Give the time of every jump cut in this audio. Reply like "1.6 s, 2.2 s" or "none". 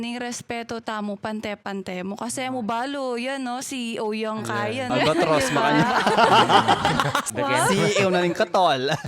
4.9 s, 7.2 s

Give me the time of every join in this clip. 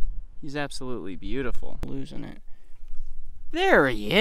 1.8 s

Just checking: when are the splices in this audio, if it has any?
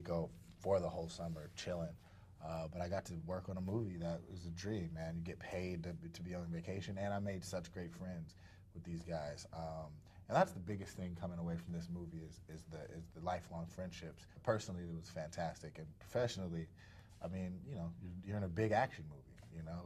14.4 s

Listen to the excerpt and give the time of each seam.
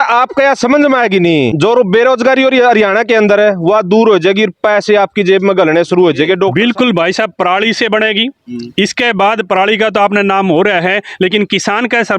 1.5 s, 6.5 s

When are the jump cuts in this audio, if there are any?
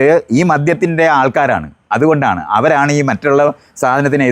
none

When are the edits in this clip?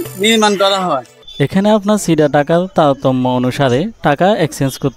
1.1 s

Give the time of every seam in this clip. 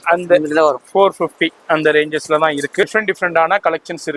2.8 s

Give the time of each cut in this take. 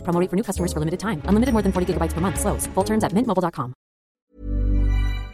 4.2 s

